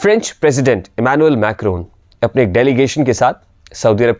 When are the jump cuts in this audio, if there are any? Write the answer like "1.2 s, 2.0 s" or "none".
none